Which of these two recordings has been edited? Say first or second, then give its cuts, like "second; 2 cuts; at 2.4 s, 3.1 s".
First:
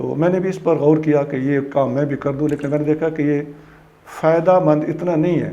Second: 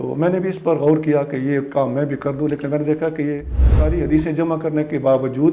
second; 1 cut; at 3.9 s